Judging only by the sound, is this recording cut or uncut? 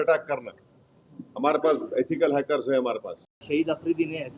cut